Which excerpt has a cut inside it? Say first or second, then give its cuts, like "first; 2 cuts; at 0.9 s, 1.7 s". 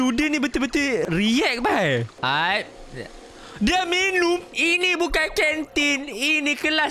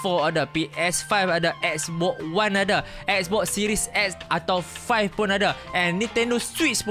first; 3 cuts; at 1.0 s, 2.2 s, 4.5 s